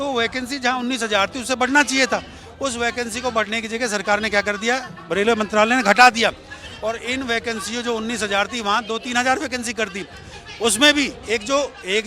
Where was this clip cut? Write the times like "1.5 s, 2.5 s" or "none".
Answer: none